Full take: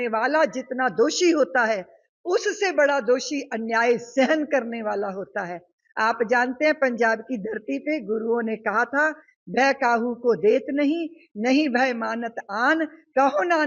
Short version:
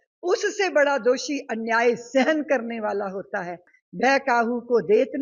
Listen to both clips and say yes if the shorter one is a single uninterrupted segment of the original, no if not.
no